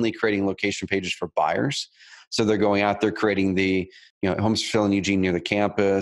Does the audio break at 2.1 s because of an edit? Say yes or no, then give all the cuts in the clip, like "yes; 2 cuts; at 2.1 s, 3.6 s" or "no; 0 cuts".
no; 1 cut; at 4.1 s